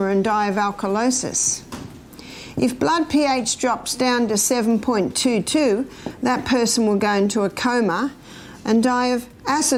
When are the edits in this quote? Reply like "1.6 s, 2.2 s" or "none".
none